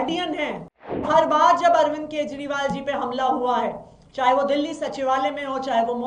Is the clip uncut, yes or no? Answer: no